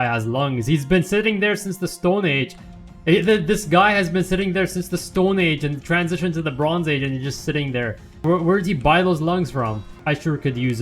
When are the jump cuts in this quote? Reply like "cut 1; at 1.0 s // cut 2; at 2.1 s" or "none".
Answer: cut 1; at 8.2 s // cut 2; at 9.9 s